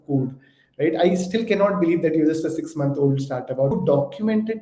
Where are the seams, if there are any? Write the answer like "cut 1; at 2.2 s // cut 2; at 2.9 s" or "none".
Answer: cut 1; at 3.7 s